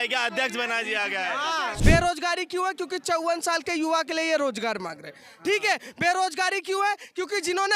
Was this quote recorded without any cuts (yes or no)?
no